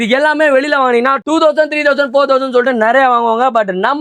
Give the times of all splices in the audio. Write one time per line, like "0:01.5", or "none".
none